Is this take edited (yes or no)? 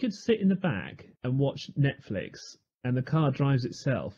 no